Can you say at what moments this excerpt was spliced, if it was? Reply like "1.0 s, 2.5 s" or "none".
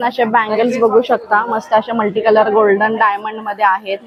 none